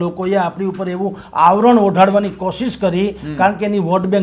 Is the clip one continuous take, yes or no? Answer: yes